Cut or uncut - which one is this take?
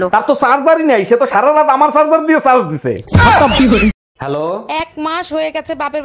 cut